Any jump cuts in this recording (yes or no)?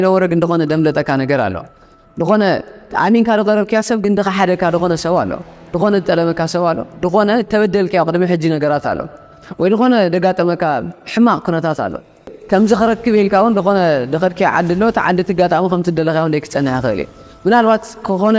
yes